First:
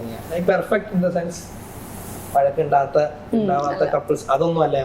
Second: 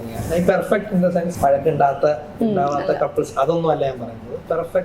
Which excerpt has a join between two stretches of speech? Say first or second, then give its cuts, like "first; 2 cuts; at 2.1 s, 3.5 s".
second; 1 cut; at 1.3 s